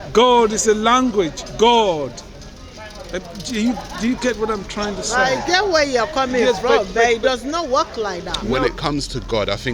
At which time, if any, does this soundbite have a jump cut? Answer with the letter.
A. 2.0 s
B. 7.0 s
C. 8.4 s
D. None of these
C